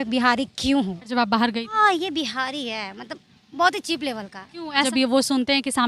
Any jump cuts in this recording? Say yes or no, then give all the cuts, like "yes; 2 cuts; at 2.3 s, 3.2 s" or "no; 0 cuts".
yes; 2 cuts; at 1.1 s, 4.9 s